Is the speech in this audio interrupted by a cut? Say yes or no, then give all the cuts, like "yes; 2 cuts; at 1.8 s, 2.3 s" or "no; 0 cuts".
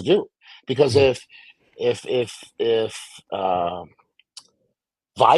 no; 0 cuts